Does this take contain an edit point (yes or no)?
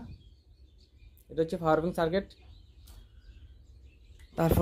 no